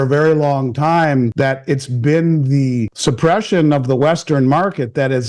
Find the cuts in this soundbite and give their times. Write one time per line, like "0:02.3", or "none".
0:01.3
0:02.9